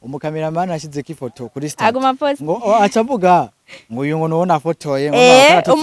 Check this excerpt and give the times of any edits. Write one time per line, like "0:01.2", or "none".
none